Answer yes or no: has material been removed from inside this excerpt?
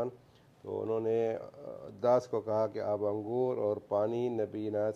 no